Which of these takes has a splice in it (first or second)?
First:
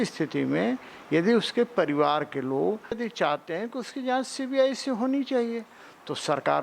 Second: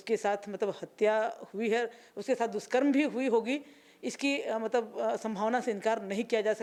first